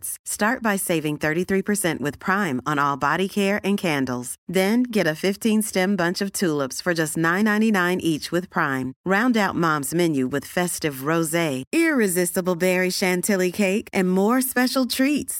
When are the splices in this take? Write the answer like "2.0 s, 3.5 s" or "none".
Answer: none